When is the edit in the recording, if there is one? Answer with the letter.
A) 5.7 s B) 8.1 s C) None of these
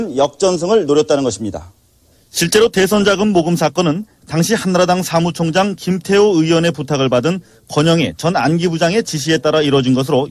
B